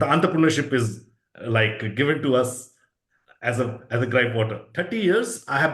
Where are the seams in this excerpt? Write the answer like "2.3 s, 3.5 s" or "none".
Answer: 4.6 s